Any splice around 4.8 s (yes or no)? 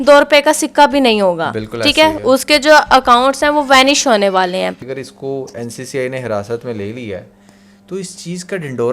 yes